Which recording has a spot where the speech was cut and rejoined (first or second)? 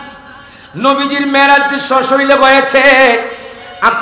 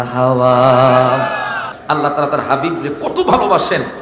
second